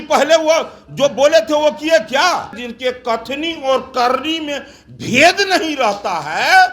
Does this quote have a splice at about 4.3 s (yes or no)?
no